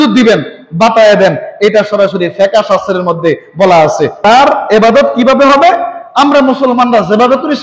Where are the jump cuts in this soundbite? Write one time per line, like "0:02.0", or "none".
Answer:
0:04.2